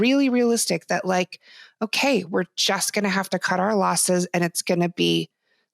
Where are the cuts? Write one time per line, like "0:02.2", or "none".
none